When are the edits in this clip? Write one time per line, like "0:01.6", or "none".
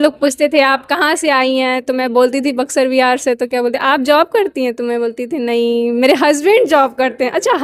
none